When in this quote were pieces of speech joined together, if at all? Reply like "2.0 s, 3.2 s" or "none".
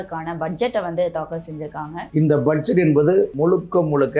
2.0 s, 3.3 s